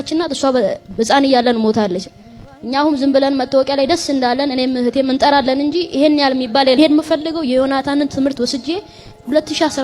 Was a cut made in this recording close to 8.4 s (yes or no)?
no